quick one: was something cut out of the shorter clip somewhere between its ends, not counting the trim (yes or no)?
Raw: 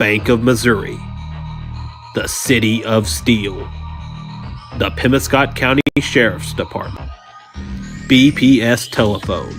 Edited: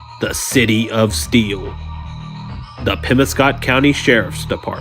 yes